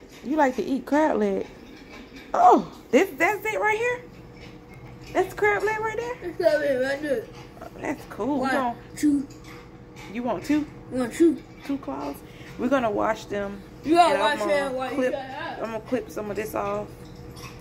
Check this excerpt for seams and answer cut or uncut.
uncut